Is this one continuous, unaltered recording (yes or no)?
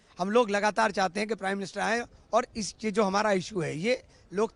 yes